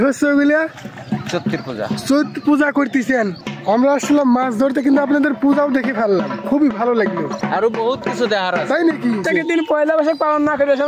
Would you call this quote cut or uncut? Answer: cut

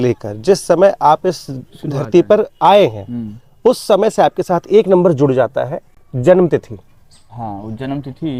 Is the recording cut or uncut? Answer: uncut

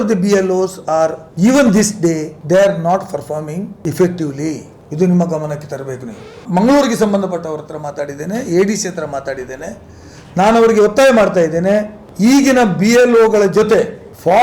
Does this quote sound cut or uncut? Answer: cut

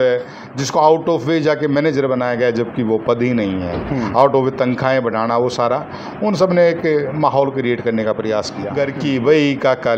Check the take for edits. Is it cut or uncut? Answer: cut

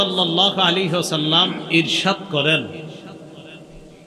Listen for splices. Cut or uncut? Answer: uncut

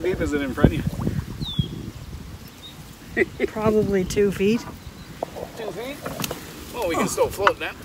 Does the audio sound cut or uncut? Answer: uncut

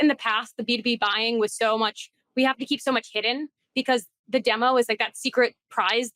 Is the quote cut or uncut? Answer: uncut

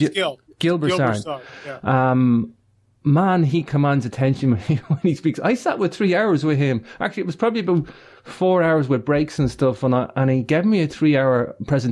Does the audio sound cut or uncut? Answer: uncut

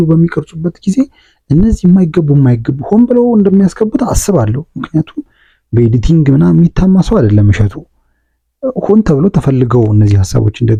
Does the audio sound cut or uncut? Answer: uncut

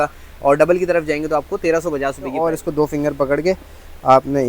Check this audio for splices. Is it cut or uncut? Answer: cut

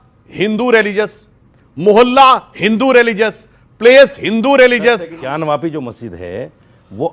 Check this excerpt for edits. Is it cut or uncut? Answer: cut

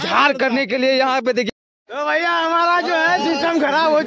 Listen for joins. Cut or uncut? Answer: cut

